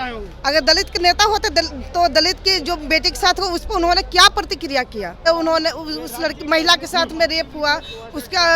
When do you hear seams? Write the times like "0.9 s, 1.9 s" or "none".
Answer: 5.3 s